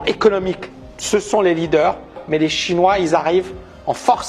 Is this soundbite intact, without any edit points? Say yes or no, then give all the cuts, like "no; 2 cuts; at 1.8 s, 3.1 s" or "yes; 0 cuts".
no; 1 cut; at 2.2 s